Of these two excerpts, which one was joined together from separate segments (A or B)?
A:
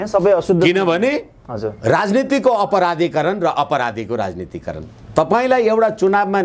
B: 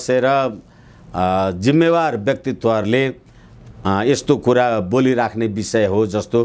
A